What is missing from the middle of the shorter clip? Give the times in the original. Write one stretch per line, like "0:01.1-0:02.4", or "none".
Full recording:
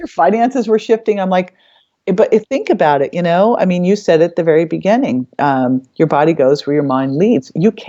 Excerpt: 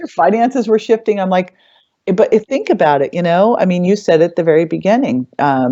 none